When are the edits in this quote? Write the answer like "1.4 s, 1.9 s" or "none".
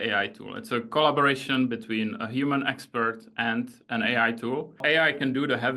4.8 s